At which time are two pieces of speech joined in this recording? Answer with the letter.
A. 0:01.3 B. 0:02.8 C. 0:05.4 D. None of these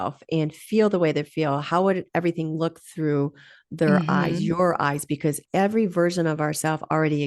C